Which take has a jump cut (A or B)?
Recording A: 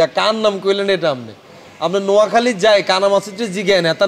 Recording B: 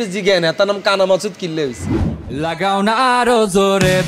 B